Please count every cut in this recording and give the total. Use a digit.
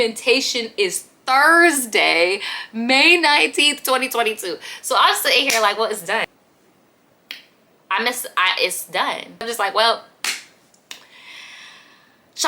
2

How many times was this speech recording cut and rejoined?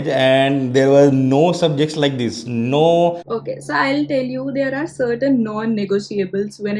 1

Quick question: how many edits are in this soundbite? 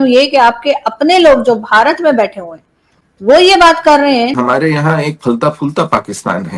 1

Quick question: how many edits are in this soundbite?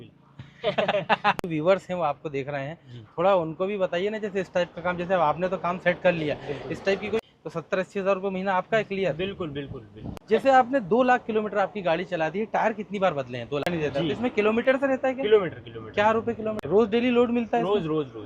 5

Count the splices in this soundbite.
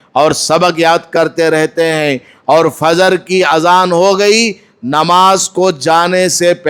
0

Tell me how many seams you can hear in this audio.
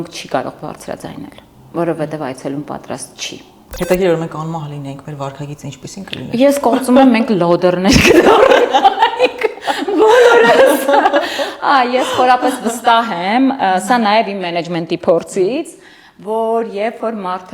1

